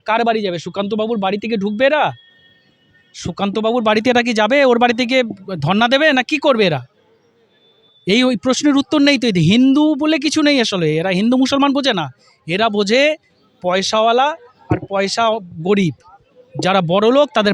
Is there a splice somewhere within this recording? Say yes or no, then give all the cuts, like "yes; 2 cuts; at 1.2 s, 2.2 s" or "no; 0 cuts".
no; 0 cuts